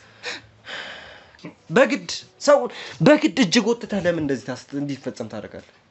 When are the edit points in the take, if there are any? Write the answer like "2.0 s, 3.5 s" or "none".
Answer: 1.3 s

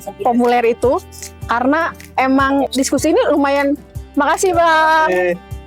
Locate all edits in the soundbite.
2.7 s

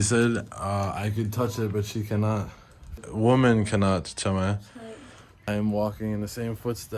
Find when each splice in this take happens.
3.0 s, 5.5 s

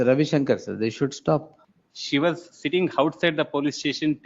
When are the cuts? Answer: 1.6 s

